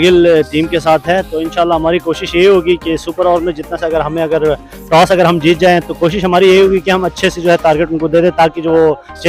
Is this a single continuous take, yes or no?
yes